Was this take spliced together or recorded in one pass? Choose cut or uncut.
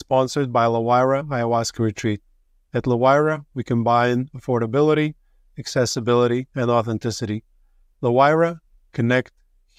uncut